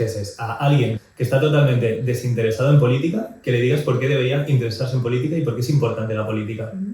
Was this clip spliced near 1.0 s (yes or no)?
yes